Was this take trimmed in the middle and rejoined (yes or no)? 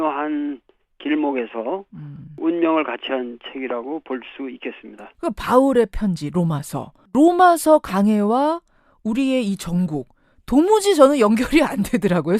yes